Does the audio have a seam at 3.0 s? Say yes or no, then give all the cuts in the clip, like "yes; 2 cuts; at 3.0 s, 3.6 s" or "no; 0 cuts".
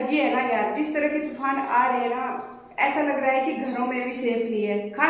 no; 0 cuts